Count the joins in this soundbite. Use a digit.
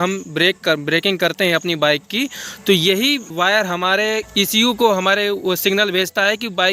2